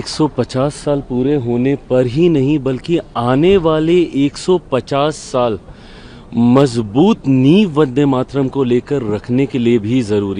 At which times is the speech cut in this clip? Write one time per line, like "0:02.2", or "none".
none